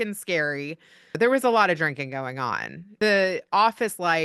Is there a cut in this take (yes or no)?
yes